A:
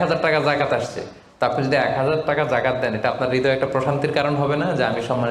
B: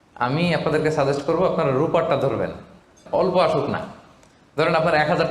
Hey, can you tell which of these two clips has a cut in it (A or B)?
B